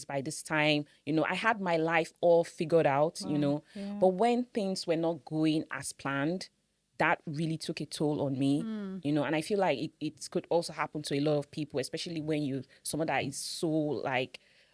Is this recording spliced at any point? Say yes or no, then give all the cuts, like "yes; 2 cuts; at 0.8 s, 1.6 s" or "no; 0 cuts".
no; 0 cuts